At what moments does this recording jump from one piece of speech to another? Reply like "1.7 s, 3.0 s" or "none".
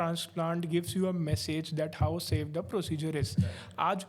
none